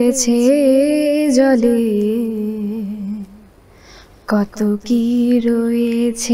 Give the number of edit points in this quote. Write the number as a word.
zero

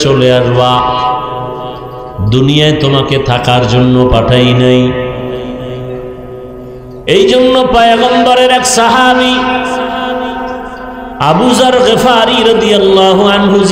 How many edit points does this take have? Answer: zero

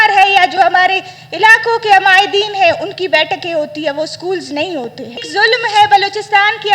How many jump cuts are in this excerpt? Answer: one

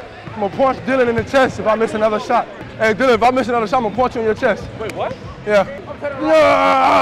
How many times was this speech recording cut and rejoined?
two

